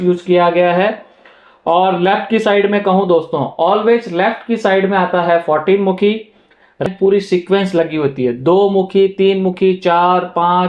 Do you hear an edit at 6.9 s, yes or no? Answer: yes